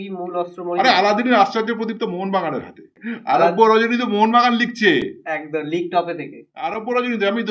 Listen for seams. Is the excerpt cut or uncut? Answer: cut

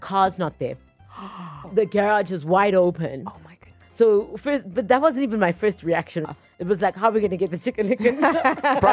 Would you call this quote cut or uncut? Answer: cut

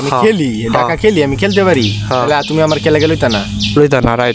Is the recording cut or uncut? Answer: uncut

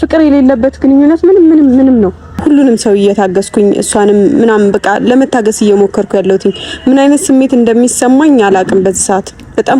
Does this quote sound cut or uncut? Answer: cut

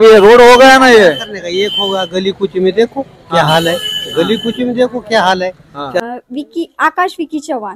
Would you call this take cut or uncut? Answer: cut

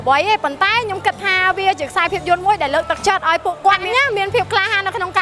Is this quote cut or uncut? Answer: cut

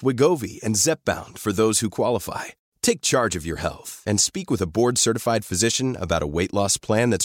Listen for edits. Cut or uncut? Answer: uncut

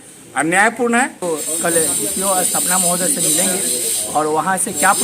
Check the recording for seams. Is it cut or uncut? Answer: cut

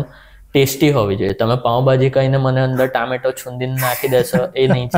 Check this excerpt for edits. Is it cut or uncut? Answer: uncut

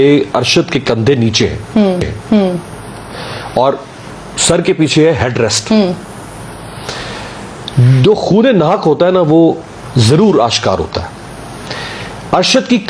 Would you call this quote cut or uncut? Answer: uncut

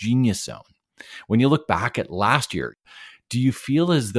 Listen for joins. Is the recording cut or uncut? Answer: cut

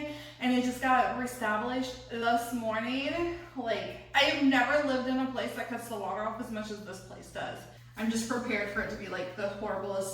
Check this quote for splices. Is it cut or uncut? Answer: cut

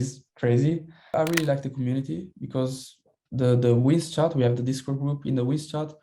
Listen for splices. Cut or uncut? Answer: cut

